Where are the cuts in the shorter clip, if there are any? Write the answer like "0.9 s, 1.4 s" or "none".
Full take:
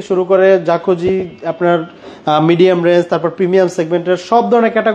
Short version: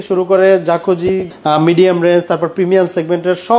1.3 s